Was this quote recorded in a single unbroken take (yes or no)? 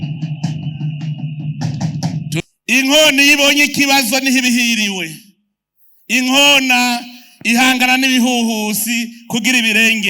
no